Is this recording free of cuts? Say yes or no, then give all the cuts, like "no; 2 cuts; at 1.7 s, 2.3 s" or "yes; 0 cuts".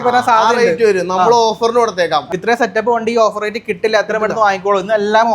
no; 1 cut; at 2.3 s